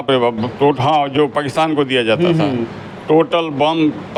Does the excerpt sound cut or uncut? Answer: uncut